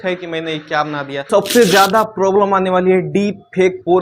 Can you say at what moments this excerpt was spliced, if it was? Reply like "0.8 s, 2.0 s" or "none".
1.3 s